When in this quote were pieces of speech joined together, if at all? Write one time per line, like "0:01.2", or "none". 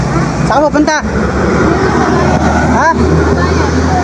none